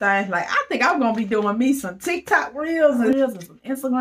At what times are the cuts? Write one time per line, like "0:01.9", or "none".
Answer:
0:03.1